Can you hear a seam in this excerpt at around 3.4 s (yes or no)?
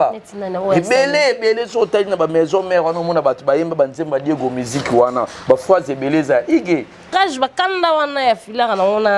no